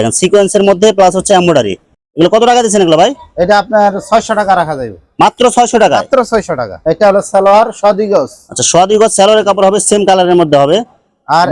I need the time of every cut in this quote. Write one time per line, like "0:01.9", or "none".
none

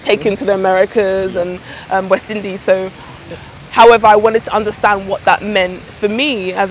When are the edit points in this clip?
0:03.1

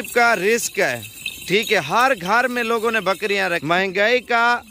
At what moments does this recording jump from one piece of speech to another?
0:03.6

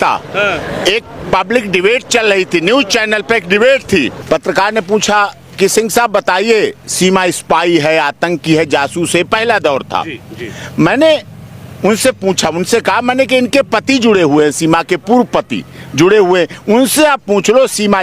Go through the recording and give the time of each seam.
0:04.2

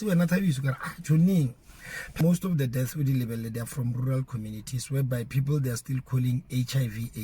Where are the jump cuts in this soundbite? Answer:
0:02.2

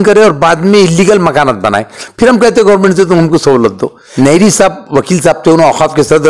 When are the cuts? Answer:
0:04.0

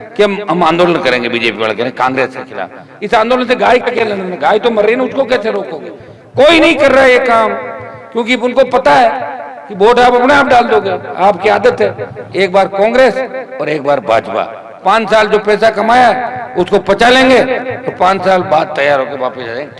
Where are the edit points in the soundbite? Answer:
none

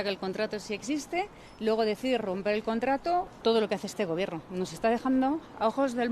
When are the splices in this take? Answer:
0:01.4
0:03.3

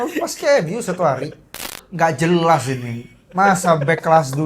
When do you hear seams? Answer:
0:01.8

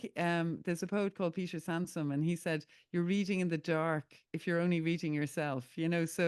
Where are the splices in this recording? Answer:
none

